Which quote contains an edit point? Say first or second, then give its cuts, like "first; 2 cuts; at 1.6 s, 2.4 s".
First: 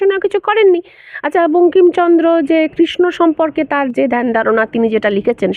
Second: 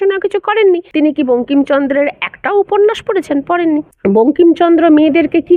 second; 2 cuts; at 0.9 s, 3.9 s